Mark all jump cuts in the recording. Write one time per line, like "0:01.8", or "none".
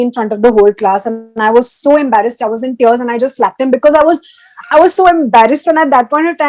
none